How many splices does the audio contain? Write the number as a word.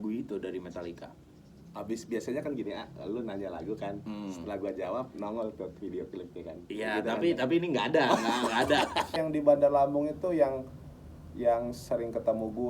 one